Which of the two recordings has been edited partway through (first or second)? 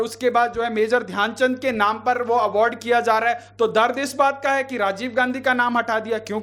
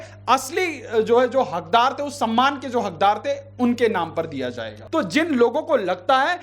second